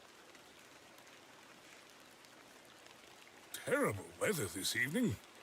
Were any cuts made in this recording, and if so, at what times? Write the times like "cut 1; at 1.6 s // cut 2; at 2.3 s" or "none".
cut 1; at 3.6 s